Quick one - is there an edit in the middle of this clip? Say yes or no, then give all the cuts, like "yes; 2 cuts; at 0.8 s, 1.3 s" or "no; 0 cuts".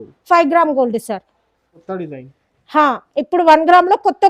yes; 1 cut; at 1.8 s